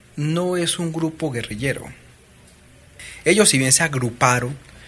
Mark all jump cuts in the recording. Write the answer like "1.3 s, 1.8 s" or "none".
none